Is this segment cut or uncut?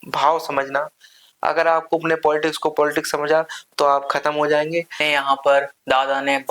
cut